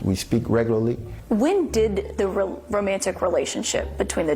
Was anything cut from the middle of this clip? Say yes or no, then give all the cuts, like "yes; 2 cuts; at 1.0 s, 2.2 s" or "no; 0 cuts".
yes; 1 cut; at 1.1 s